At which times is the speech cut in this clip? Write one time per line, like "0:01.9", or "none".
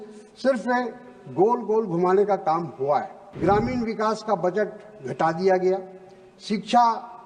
0:03.2